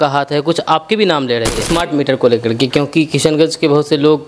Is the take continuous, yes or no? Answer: no